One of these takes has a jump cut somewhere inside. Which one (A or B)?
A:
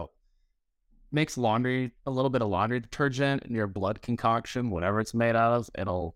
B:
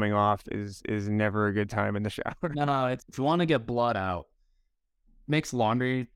B